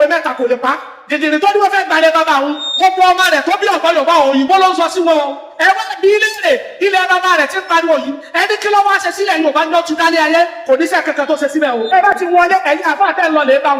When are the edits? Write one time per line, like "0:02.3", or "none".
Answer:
none